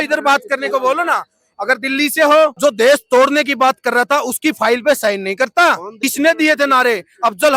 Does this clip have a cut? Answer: yes; 2 cuts; at 2.5 s, 5.9 s

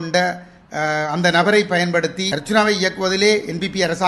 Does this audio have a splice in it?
yes; 1 cut; at 2.3 s

